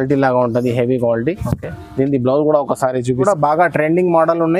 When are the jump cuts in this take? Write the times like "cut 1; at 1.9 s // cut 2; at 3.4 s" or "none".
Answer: cut 1; at 3.2 s